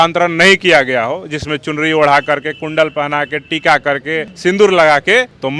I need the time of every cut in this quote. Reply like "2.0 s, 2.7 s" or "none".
none